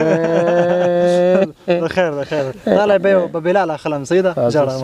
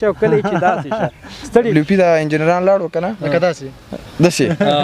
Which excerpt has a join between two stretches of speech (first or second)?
second